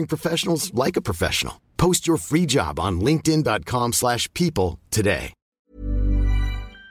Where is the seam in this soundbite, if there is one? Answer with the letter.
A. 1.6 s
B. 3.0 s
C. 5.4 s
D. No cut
C